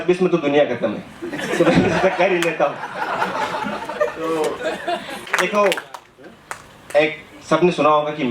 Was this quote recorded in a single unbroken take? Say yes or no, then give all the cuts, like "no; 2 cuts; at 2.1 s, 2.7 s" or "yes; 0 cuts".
no; 1 cut; at 5.2 s